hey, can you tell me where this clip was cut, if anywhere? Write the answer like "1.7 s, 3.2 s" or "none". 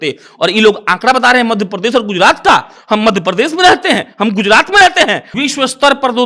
5.2 s